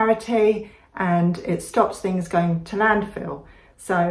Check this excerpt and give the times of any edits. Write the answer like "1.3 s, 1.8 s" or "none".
none